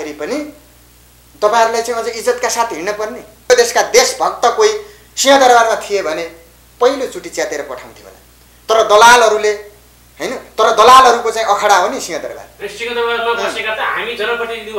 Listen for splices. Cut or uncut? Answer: cut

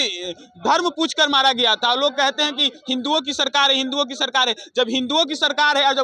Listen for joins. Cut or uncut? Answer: uncut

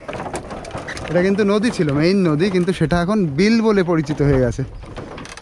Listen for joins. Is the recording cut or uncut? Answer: uncut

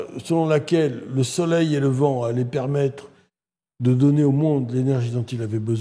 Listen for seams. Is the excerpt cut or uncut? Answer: uncut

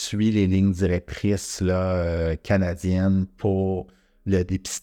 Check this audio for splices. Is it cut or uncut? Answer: uncut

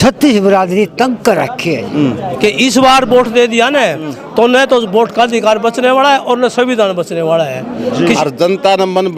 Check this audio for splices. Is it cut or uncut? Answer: cut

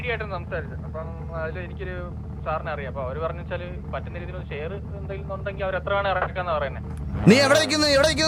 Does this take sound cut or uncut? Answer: uncut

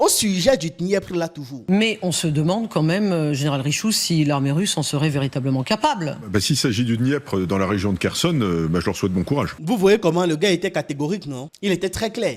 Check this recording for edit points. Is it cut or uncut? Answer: cut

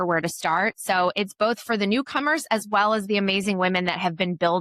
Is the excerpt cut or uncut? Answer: uncut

